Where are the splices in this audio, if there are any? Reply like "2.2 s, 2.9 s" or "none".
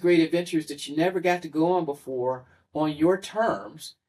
none